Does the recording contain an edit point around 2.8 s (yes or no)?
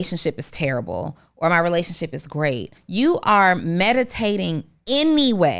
yes